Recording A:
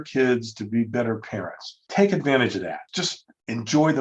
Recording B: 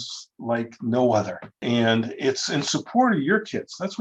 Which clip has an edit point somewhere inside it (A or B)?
A